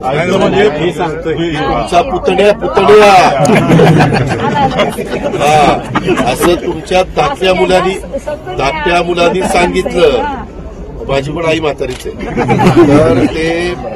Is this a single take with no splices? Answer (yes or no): yes